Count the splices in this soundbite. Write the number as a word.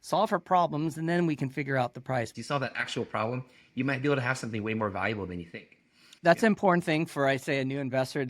two